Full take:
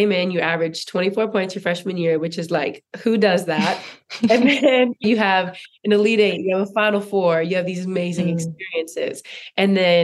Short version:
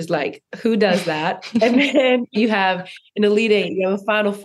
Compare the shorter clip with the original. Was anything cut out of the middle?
yes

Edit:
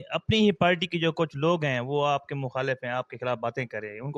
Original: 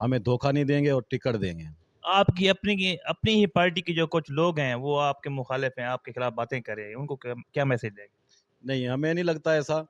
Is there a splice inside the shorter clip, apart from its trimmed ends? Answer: no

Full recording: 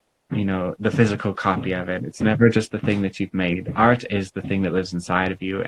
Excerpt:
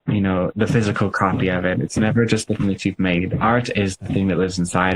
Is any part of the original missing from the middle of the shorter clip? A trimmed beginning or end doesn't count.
yes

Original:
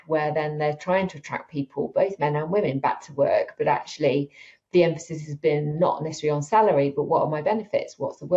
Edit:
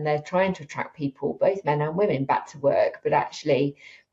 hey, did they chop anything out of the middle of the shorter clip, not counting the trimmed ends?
no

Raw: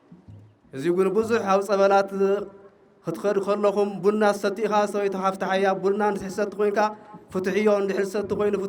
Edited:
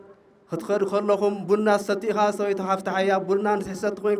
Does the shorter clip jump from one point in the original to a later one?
no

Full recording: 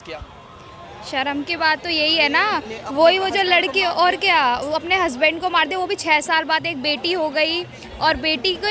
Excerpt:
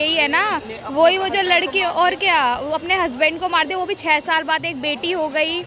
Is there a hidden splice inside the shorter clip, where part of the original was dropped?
no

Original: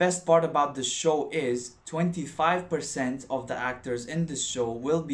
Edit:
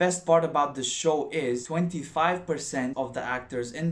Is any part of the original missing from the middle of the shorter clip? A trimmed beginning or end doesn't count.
yes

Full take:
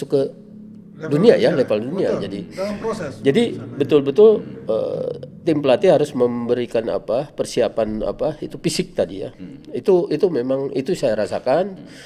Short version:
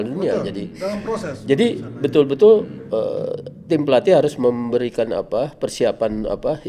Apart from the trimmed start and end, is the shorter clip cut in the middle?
no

